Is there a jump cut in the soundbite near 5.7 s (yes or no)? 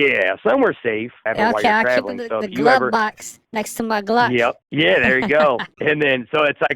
yes